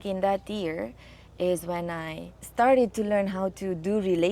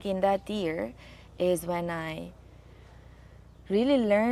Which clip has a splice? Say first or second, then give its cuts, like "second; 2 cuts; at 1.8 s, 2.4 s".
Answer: first; 1 cut; at 2.4 s